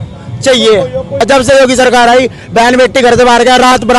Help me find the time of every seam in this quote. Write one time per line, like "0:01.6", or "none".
0:01.2